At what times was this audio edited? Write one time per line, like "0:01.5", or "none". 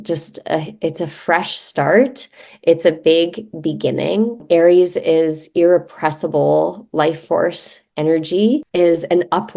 0:04.4
0:08.7